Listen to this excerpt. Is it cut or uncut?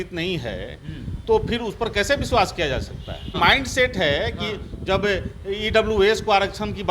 cut